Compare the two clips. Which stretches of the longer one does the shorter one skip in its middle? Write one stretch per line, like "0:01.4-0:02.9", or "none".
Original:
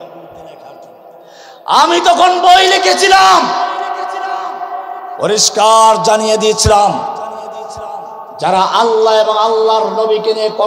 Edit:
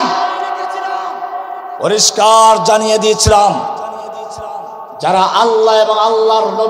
none